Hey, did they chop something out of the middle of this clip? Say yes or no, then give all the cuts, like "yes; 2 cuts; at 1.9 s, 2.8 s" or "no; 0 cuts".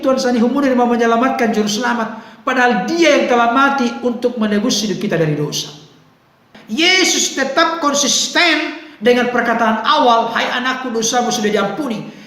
yes; 1 cut; at 6.5 s